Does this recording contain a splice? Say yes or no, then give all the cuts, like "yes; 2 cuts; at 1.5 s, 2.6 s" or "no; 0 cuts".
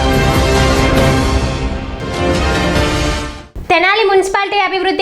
yes; 1 cut; at 3.4 s